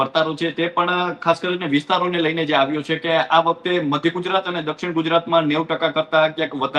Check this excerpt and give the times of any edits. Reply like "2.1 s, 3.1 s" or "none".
none